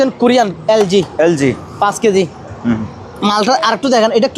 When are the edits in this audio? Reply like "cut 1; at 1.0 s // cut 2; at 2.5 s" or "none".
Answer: none